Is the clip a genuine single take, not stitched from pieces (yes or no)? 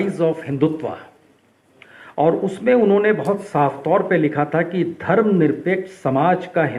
yes